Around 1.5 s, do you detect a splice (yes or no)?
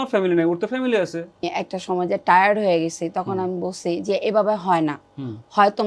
yes